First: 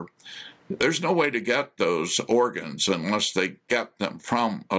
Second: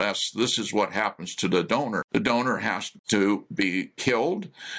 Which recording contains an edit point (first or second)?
second